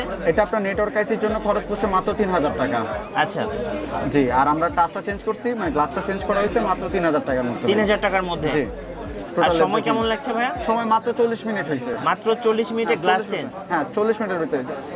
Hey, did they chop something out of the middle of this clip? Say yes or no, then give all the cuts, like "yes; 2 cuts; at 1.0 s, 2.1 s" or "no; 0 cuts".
no; 0 cuts